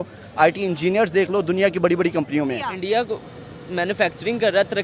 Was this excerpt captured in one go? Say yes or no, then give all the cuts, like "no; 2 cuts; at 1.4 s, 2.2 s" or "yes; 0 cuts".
no; 1 cut; at 2.7 s